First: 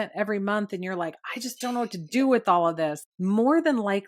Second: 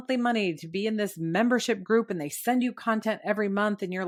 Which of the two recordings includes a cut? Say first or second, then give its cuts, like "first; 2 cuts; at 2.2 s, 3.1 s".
first; 1 cut; at 3.1 s